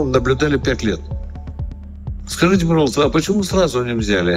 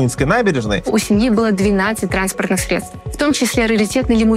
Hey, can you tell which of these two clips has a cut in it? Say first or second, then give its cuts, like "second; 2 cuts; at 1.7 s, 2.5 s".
second; 2 cuts; at 0.9 s, 3.0 s